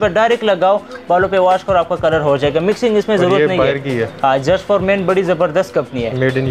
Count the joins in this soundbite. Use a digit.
0